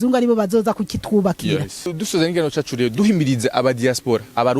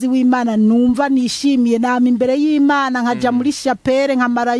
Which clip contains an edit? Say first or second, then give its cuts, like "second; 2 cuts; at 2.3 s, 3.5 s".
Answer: first; 1 cut; at 1.9 s